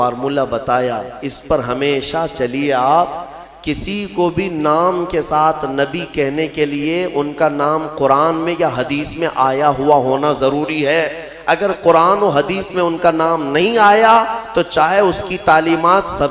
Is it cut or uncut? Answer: uncut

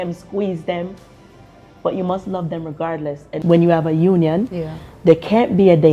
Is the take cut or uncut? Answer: uncut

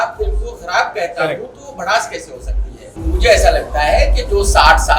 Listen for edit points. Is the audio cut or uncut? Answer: cut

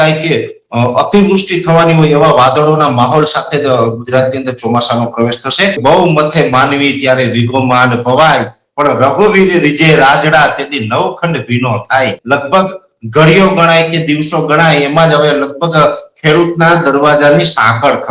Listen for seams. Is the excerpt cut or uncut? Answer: cut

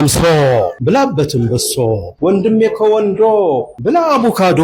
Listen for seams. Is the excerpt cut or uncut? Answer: cut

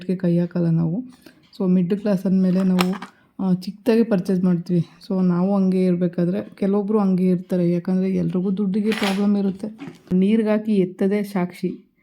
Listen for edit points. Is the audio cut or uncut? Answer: cut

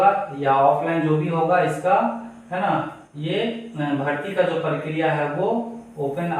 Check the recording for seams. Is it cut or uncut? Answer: uncut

